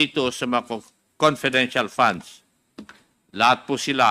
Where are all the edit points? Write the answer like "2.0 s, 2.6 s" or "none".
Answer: none